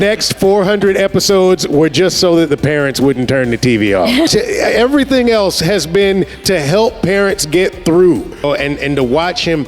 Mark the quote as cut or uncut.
cut